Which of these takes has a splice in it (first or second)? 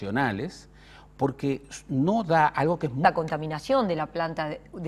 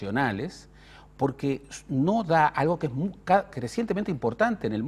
second